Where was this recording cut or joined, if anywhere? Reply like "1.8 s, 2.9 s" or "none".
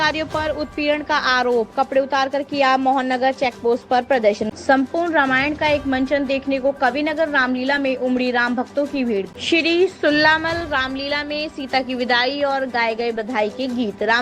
4.5 s, 9.3 s